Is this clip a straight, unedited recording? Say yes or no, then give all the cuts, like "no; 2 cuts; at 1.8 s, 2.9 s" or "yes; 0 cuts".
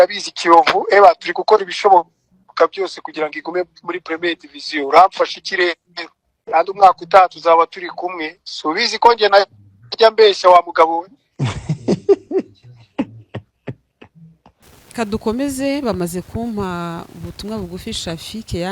no; 1 cut; at 14.6 s